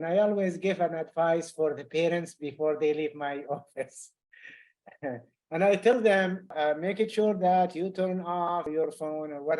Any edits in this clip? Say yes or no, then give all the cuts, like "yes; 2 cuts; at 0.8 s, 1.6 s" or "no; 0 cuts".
yes; 2 cuts; at 6.5 s, 8.7 s